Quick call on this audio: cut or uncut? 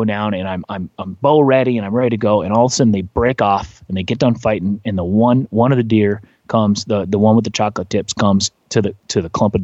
uncut